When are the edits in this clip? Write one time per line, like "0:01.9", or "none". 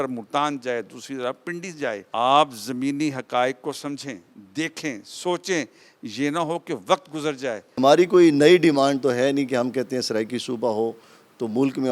0:02.0
0:07.8